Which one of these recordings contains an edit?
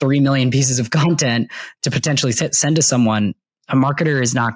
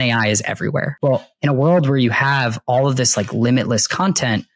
second; 1 cut; at 0.9 s

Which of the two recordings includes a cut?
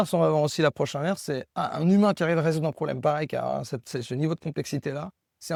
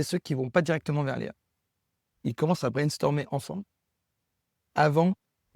second; 1 cut; at 2.1 s

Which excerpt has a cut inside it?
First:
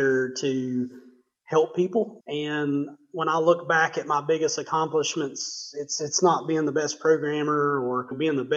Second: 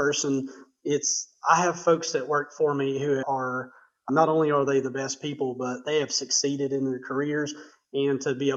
first; 1 cut; at 2.2 s

